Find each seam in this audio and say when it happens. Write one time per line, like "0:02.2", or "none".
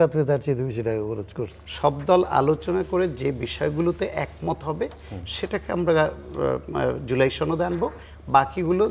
0:01.5